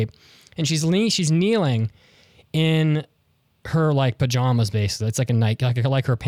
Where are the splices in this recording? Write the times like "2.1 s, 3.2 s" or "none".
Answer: none